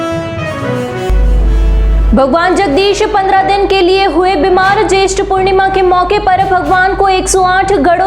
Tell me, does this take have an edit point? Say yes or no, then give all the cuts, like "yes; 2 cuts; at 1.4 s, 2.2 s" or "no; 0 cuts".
yes; 1 cut; at 1.0 s